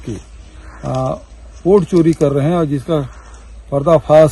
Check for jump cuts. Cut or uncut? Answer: uncut